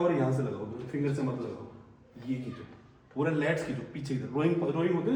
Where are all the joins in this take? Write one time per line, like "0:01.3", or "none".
none